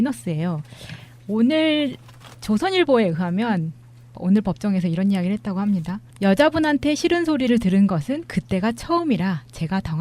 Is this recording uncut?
no; 1 cut; at 1.7 s

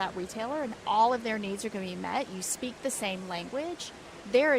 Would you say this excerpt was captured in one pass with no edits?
yes; 0 cuts

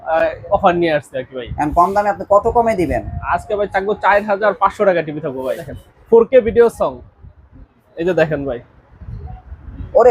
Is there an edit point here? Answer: yes; 1 cut; at 5.6 s

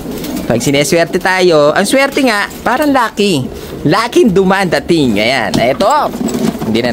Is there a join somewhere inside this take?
no; 0 cuts

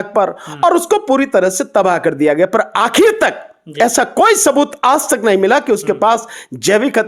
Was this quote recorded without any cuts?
yes; 0 cuts

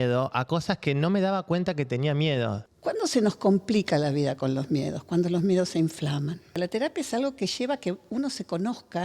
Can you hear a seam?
yes; 2 cuts; at 2.6 s, 6.6 s

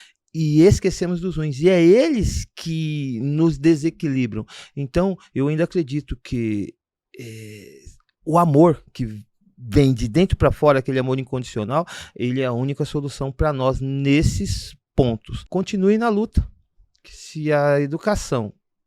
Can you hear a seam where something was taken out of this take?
yes; 1 cut; at 15.3 s

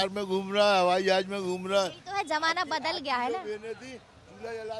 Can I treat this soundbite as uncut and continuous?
yes; 0 cuts

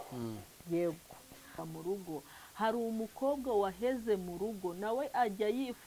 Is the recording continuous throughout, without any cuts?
no; 1 cut; at 1.6 s

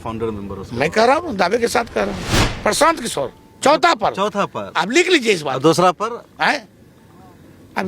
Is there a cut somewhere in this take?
yes; 1 cut; at 2.2 s

